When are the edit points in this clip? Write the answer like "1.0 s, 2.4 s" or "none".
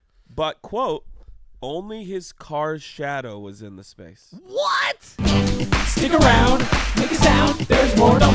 5.2 s

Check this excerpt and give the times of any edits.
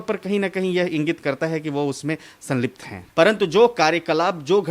3.0 s

